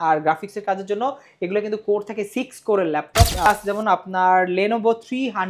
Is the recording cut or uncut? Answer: cut